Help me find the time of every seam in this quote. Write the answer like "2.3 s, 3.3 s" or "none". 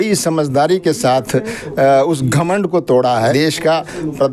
3.2 s